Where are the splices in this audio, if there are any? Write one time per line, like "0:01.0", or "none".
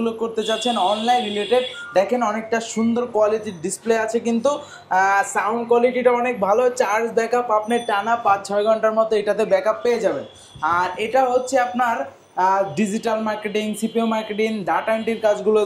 none